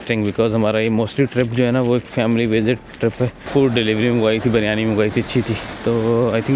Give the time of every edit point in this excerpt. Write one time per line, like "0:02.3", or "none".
0:03.4